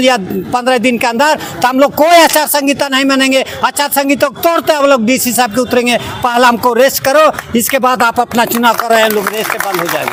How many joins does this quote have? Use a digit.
0